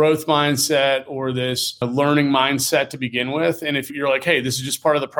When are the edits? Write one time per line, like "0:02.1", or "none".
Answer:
0:01.8